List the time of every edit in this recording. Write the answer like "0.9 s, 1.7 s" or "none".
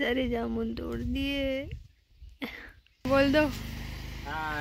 3.1 s